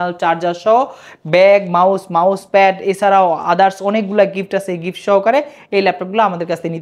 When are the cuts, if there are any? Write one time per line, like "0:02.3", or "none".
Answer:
none